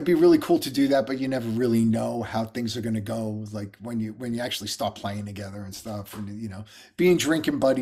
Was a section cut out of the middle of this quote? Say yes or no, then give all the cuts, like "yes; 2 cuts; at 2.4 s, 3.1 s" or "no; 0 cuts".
no; 0 cuts